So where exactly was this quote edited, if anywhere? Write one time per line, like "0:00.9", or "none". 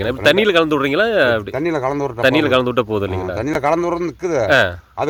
none